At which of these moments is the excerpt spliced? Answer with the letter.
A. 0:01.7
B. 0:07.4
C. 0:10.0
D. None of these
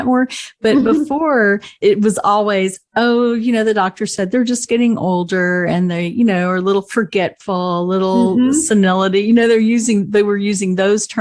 A